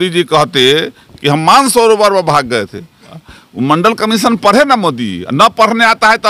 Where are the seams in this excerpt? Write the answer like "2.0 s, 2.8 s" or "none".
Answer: 3.2 s